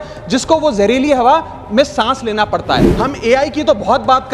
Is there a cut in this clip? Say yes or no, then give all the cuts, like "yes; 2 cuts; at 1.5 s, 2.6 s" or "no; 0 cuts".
yes; 1 cut; at 2.9 s